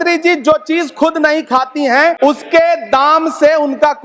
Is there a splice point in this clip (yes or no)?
yes